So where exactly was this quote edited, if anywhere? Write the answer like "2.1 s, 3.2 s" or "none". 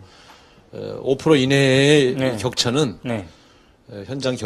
3.4 s